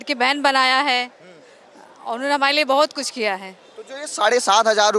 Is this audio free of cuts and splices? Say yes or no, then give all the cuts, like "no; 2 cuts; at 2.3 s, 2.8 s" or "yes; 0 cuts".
yes; 0 cuts